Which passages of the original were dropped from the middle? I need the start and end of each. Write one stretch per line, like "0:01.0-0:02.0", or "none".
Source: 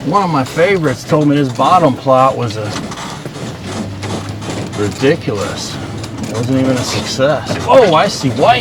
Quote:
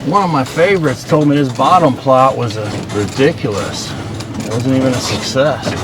0:02.7-0:04.6